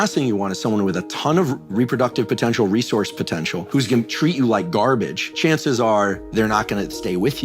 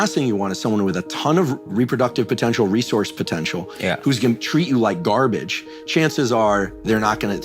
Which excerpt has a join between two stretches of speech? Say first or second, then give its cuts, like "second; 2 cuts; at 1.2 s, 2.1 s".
first; 2 cuts; at 3.7 s, 5.2 s